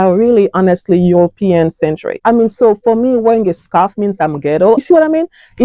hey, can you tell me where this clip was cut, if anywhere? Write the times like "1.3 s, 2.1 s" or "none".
2.1 s